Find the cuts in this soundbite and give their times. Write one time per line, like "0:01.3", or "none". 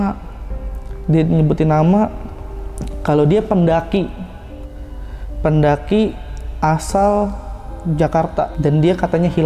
0:08.5